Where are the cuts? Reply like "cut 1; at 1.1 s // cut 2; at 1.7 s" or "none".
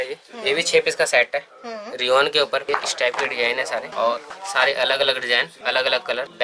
cut 1; at 2.6 s